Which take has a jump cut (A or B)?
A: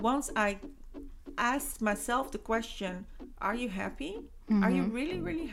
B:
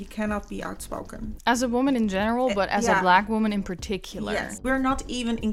B